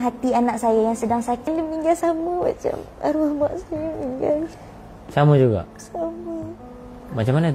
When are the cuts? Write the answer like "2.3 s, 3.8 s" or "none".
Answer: 1.5 s